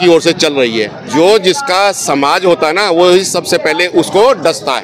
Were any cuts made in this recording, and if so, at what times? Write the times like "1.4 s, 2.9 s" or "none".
1.0 s